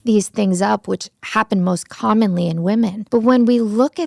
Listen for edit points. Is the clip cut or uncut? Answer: cut